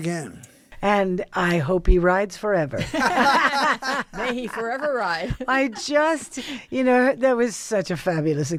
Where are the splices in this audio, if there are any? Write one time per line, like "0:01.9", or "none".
none